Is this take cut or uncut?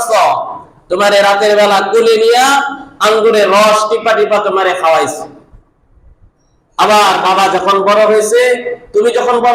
uncut